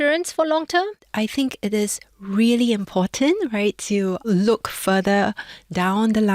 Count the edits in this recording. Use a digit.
2